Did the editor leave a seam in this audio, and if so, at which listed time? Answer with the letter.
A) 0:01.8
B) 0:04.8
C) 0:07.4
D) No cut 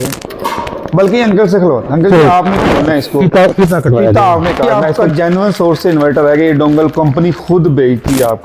B